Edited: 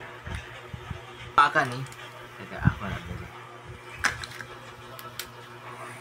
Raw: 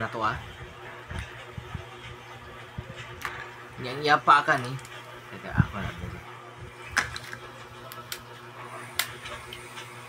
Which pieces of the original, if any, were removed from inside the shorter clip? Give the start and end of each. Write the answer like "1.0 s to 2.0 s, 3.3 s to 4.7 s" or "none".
2.2 s to 4.3 s